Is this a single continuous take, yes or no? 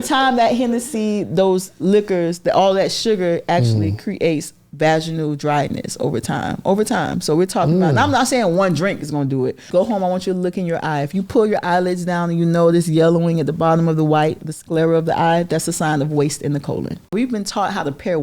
no